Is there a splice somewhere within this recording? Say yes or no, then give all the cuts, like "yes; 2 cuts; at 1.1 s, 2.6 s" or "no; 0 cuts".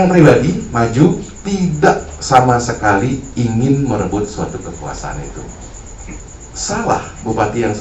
yes; 1 cut; at 6.3 s